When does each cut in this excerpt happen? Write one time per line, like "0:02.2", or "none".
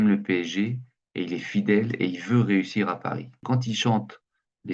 0:03.3